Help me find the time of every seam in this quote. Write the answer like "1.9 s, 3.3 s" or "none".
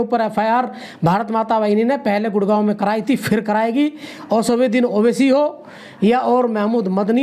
none